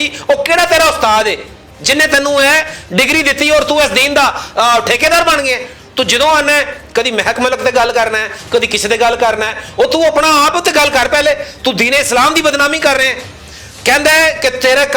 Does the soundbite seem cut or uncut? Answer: uncut